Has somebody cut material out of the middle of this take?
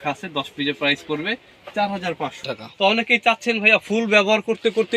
yes; 1 cut; at 2.4 s

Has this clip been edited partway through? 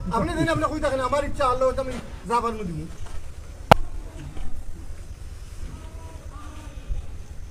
no; 0 cuts

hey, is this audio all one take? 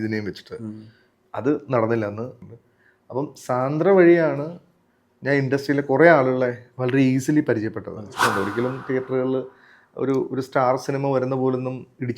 no; 2 cuts; at 2.4 s, 8.2 s

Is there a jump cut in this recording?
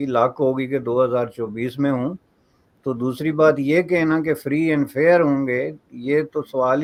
no; 0 cuts

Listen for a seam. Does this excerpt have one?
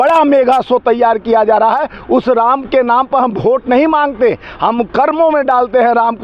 no; 0 cuts

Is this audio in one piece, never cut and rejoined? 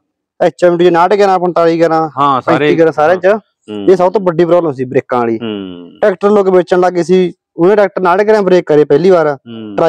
yes; 0 cuts

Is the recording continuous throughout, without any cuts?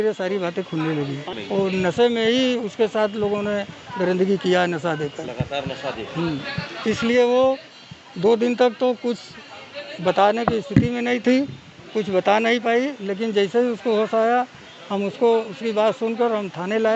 no; 1 cut; at 1.3 s

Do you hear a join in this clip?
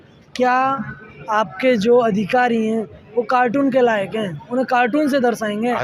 no; 0 cuts

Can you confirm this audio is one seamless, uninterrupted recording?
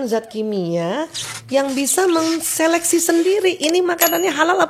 yes; 0 cuts

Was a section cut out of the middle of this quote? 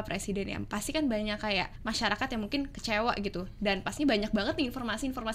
yes; 1 cut; at 1.7 s

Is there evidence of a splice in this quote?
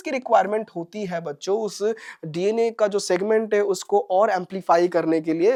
no; 0 cuts

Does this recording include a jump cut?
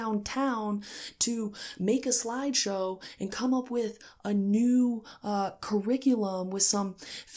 no; 0 cuts

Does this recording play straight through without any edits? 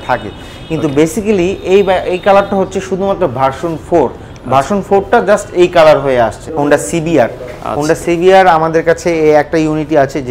no; 1 cut; at 6.4 s

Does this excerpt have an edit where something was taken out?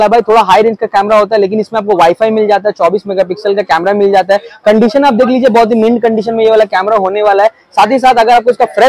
no; 0 cuts

